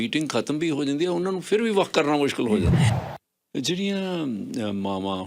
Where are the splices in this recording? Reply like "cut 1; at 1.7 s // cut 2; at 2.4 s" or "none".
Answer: cut 1; at 2.9 s